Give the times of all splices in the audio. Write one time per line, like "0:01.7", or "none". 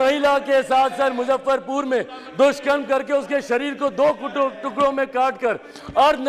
none

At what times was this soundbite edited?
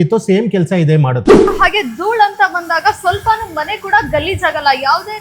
0:01.5

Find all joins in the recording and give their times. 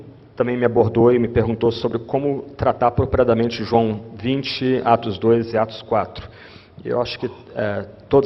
0:01.6

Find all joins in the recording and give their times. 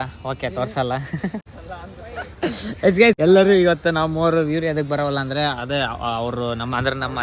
none

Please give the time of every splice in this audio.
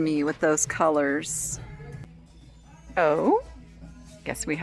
0:02.1

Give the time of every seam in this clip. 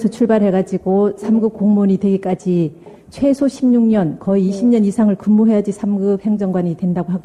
none

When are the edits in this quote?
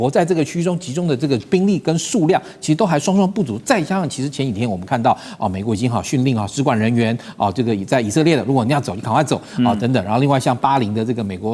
none

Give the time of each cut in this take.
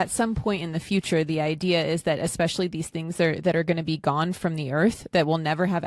none

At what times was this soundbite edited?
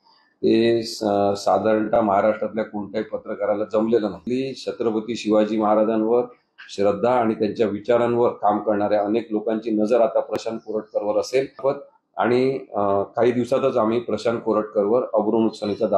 0:04.2
0:11.6

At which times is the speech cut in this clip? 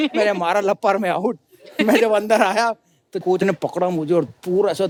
none

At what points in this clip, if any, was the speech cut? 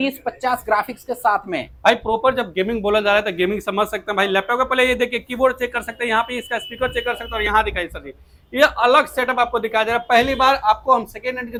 none

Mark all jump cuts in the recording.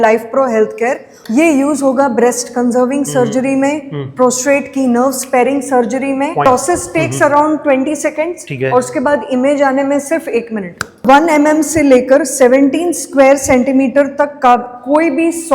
0:01.1
0:06.5
0:11.0

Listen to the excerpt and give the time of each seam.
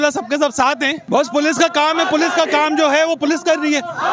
0:01.0

